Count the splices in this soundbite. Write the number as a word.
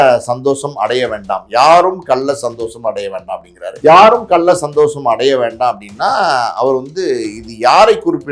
one